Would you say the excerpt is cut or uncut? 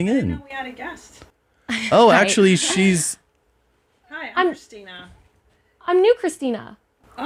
uncut